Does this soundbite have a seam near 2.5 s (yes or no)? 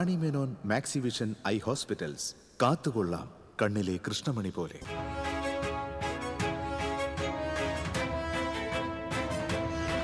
no